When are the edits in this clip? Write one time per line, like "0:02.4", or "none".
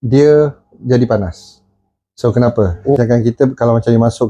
0:03.0